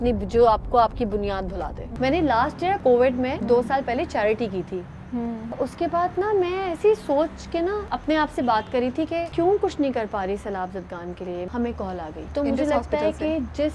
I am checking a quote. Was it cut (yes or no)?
yes